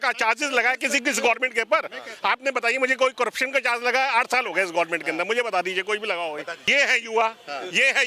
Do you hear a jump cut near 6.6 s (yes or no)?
yes